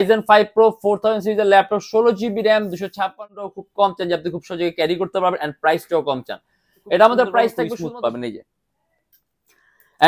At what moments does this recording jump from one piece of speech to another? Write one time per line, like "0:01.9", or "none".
0:03.4
0:07.7